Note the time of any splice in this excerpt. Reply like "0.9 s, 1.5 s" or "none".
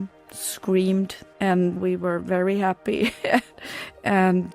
1.6 s, 3.5 s